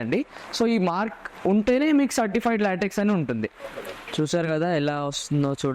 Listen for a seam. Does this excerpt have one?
yes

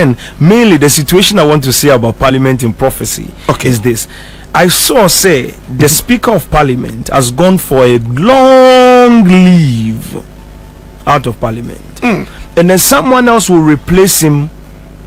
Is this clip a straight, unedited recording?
yes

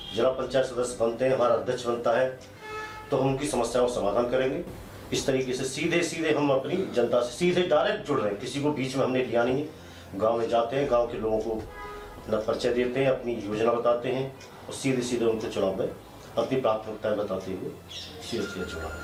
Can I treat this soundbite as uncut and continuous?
yes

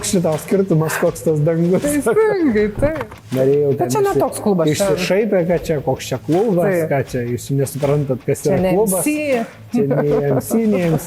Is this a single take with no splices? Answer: no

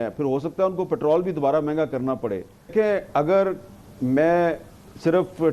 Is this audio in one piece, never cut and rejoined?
no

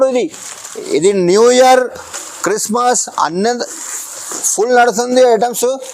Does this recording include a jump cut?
no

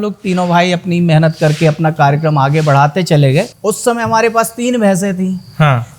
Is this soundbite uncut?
no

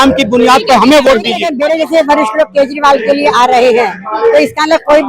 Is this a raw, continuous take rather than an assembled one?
no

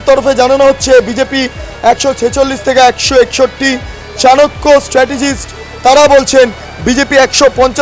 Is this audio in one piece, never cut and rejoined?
yes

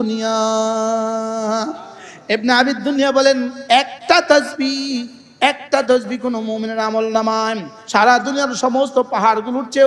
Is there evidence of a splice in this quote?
yes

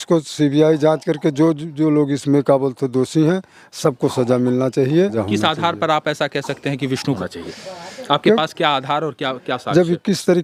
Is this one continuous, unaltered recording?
yes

